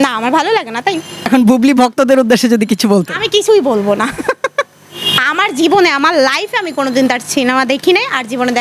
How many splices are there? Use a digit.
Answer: 0